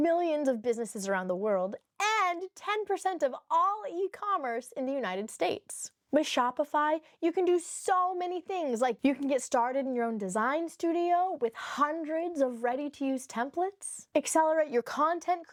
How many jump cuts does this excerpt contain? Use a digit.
0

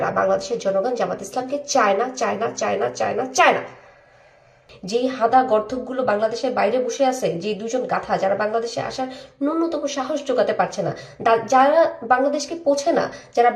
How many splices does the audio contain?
1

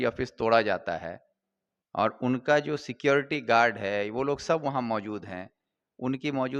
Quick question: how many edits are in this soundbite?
0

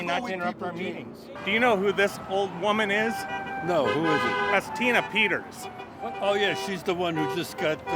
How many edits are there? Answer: 1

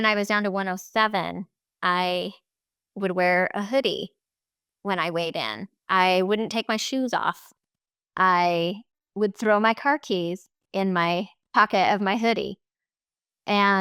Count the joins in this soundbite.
1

